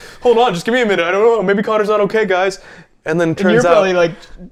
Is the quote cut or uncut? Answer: uncut